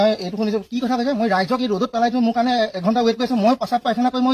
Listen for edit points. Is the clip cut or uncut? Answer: uncut